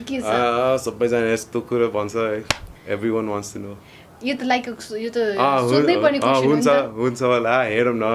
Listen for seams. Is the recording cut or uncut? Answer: uncut